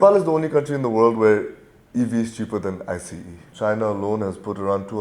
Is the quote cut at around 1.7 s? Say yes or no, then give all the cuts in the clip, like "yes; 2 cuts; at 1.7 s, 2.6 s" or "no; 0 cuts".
no; 1 cut; at 3.4 s